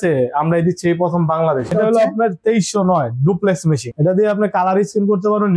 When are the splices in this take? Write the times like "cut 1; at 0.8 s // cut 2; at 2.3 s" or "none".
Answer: cut 1; at 1.7 s // cut 2; at 4.0 s